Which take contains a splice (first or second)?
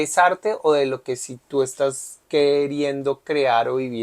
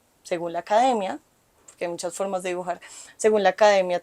first